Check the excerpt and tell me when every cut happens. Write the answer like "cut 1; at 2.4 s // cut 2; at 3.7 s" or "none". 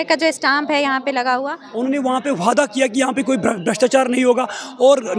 cut 1; at 1.6 s